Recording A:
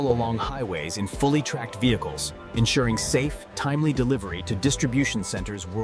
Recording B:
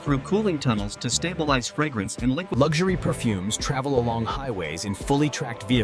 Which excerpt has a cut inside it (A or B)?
B